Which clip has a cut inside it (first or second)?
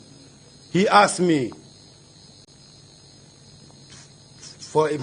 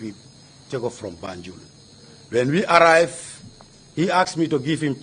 second